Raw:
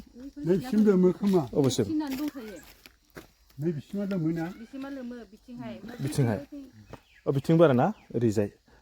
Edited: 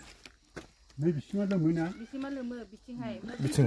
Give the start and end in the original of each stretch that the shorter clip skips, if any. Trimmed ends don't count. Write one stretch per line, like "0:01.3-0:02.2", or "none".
none